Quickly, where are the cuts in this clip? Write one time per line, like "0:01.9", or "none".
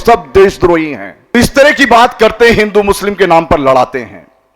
0:01.3